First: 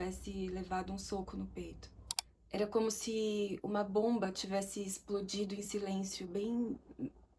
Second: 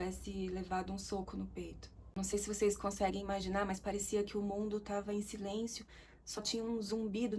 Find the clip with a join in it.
first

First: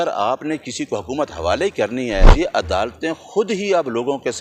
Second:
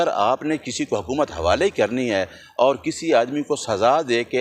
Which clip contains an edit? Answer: first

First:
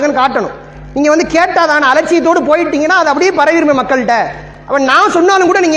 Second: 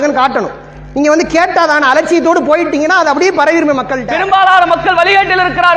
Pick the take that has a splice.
second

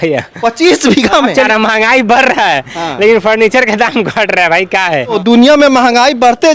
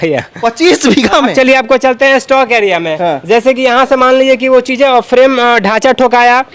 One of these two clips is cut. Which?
first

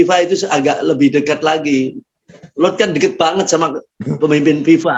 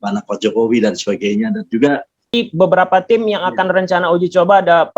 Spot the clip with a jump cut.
second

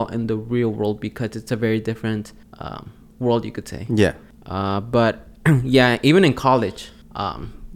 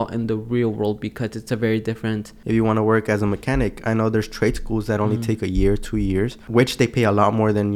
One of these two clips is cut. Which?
second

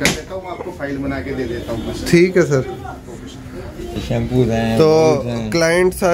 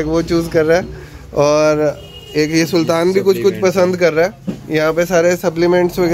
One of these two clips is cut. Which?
first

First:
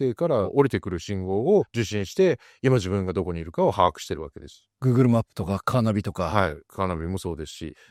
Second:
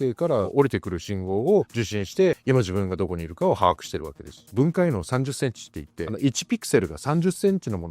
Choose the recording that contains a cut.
second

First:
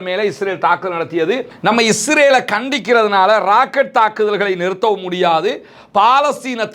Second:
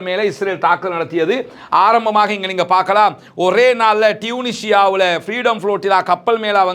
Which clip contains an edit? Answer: first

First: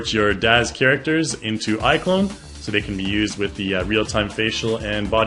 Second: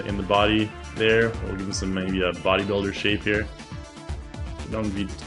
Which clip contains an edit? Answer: second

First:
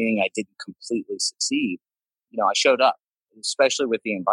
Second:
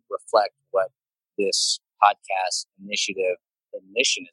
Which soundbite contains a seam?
first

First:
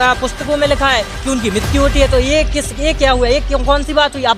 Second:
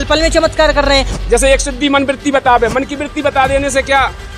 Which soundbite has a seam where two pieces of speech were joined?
second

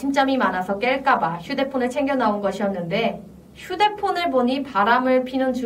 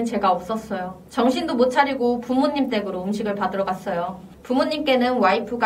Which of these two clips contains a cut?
second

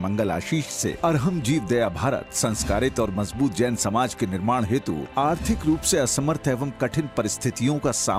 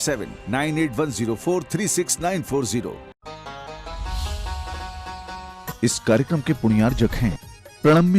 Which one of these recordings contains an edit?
second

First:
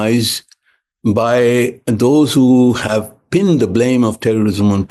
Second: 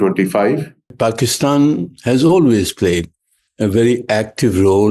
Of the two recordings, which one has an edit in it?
second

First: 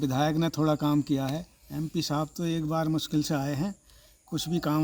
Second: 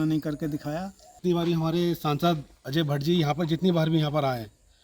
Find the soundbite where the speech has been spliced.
second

